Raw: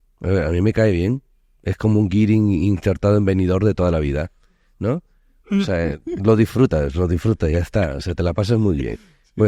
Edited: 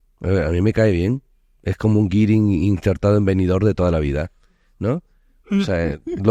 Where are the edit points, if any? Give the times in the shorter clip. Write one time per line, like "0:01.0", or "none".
none